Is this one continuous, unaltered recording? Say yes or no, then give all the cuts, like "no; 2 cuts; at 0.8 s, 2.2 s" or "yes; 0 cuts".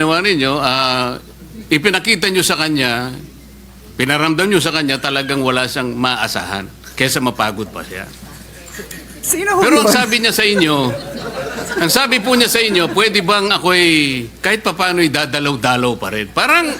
yes; 0 cuts